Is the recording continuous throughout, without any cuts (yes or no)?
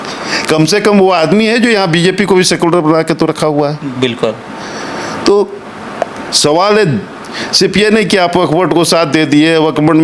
yes